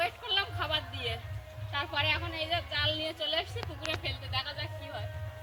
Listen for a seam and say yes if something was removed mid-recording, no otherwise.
no